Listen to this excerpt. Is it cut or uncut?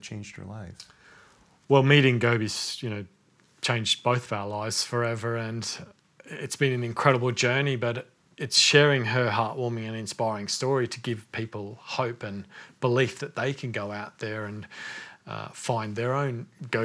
uncut